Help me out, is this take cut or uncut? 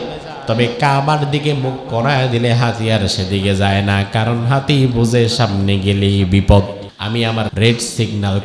cut